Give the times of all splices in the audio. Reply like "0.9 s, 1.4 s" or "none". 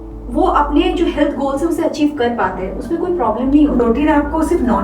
3.8 s